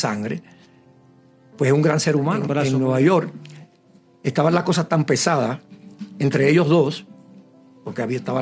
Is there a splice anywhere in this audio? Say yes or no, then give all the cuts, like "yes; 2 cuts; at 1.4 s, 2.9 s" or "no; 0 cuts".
yes; 1 cut; at 2.6 s